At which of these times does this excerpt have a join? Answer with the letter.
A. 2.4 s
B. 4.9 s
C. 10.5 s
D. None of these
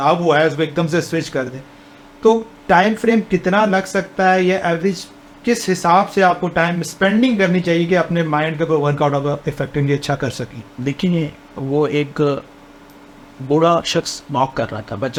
D